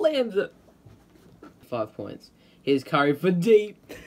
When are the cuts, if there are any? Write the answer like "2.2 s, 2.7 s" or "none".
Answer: 1.7 s